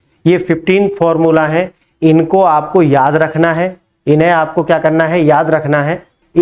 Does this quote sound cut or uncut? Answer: uncut